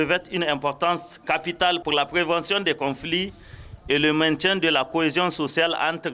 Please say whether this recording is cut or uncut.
cut